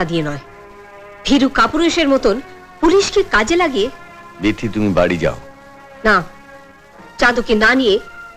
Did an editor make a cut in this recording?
no; 0 cuts

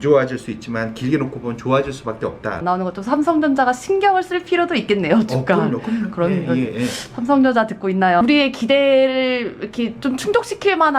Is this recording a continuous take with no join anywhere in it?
no; 2 cuts; at 2.6 s, 8.2 s

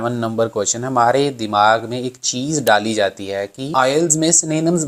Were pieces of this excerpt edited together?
no; 0 cuts

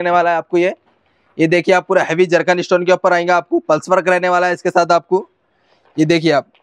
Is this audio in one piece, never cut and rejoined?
yes; 0 cuts

